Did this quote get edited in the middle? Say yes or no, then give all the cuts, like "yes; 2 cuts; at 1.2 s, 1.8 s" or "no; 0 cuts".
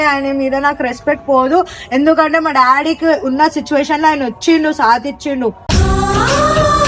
no; 0 cuts